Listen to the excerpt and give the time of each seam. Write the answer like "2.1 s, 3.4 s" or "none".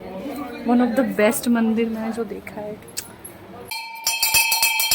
3.7 s